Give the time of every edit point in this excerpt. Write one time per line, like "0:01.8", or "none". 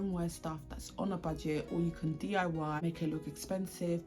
0:02.8